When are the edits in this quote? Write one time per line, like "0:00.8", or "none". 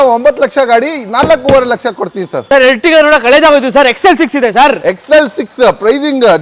none

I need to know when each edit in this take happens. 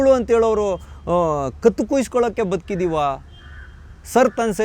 none

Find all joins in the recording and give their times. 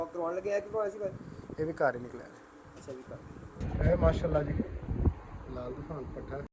0:03.6

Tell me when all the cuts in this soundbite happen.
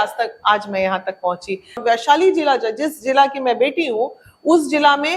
0:01.8

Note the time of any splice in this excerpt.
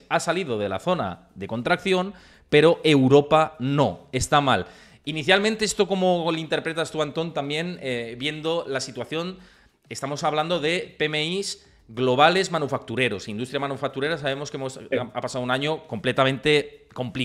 none

